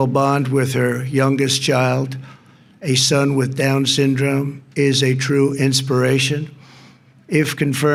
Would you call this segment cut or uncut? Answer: uncut